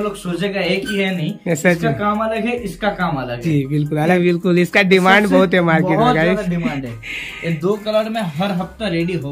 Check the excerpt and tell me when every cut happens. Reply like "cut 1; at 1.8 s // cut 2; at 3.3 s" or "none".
cut 1; at 4.2 s